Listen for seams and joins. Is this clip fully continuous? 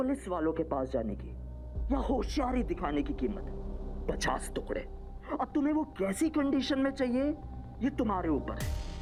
yes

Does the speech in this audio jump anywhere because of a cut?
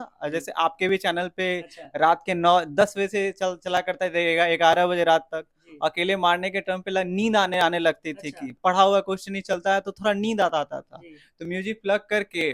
no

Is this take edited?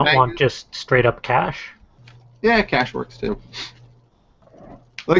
no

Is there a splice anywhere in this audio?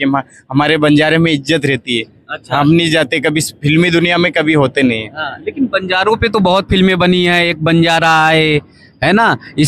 no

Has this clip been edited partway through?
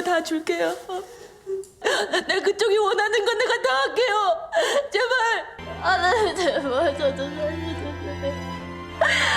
yes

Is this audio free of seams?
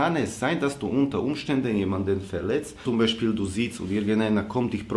no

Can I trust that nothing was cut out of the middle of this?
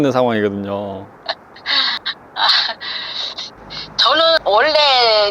no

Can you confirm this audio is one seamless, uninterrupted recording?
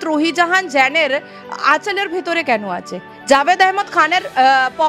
yes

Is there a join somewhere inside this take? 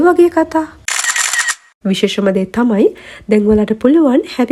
yes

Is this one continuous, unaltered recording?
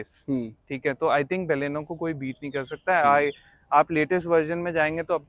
yes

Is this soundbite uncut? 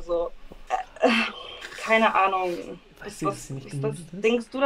yes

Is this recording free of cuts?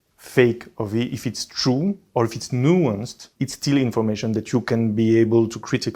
yes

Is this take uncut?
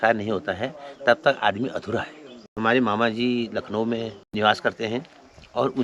no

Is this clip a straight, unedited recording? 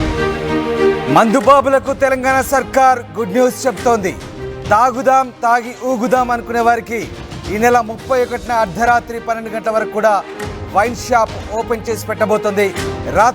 no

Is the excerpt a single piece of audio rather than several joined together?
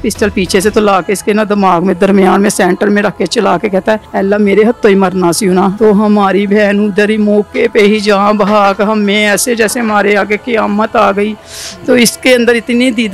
no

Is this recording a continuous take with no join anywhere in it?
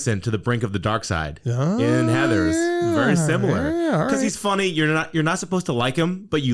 yes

